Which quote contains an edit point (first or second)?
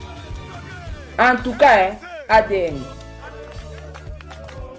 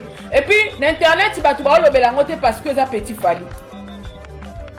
first